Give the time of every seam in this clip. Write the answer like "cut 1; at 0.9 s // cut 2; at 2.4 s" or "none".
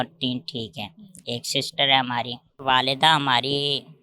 cut 1; at 2.4 s